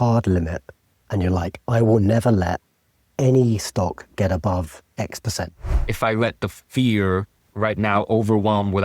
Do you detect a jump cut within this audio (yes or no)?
yes